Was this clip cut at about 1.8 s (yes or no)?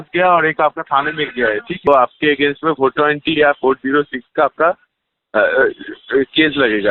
yes